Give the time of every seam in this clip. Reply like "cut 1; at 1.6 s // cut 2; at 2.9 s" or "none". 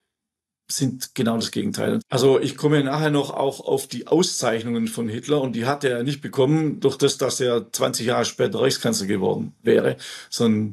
cut 1; at 2.0 s